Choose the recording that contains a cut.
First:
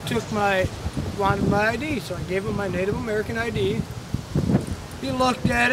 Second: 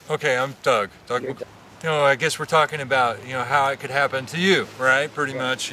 second; 1 cut; at 1.4 s

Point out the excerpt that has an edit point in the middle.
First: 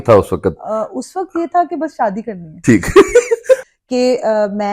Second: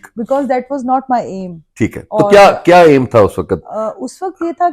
first; 1 cut; at 3.7 s

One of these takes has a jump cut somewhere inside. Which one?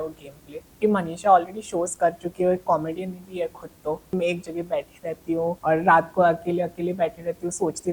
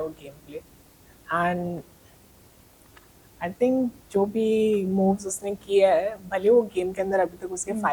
first; 3 cuts; at 0.8 s, 4.1 s, 5.6 s

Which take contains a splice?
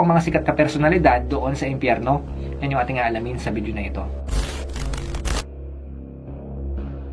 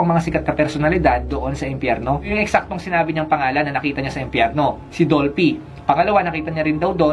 second; 1 cut; at 2.3 s

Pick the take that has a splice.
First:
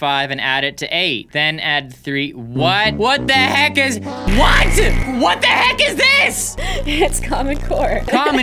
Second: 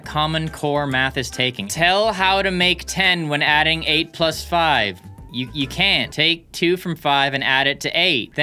second; 1 cut; at 1.7 s

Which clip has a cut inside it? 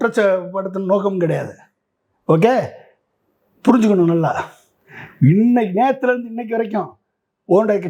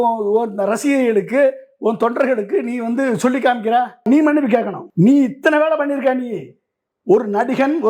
second; 2 cuts; at 4.0 s, 4.8 s

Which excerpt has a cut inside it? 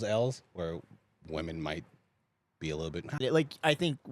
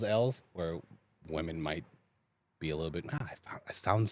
first; 1 cut; at 3.2 s

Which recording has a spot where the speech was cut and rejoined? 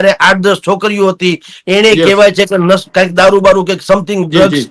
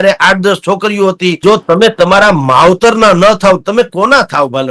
second; 1 cut; at 1.4 s

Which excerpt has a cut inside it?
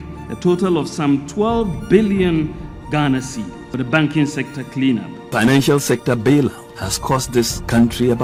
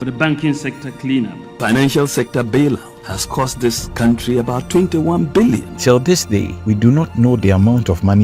second; 2 cuts; at 5.7 s, 6.5 s

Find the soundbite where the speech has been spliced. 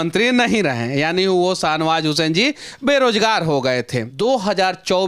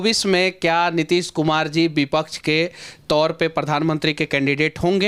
first; 1 cut; at 4.0 s

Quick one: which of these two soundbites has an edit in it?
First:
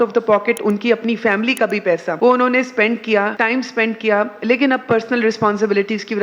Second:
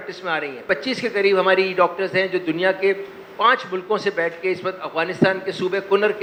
first; 2 cuts; at 2.1 s, 3.3 s

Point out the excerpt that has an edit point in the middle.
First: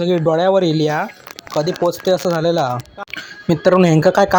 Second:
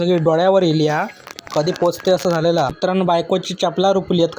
second; 1 cut; at 2.7 s

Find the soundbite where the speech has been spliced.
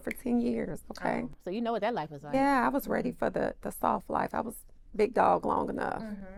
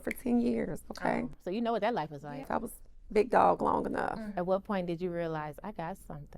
second; 2 cuts; at 2.3 s, 4.3 s

